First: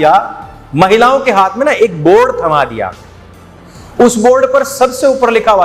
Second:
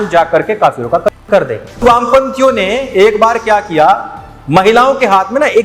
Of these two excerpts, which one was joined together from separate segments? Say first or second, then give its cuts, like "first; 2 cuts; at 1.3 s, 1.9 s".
second; 1 cut; at 1.8 s